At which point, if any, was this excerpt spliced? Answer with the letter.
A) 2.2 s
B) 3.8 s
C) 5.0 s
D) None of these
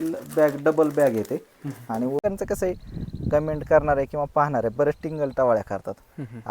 A